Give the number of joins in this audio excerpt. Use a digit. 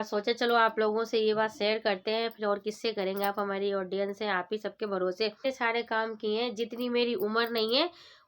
1